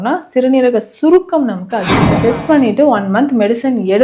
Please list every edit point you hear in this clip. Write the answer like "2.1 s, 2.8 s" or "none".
2.1 s